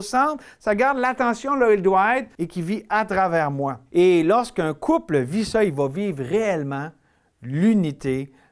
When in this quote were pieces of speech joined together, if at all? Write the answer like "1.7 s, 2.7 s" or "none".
2.4 s, 3.8 s